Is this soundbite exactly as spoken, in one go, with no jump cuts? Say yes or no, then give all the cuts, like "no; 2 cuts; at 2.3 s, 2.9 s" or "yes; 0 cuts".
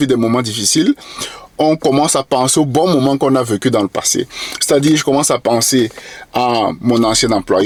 yes; 0 cuts